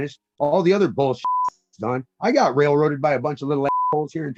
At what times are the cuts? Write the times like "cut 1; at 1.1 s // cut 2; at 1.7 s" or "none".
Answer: none